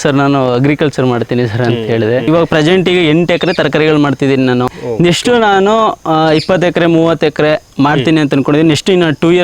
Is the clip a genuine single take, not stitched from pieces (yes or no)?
no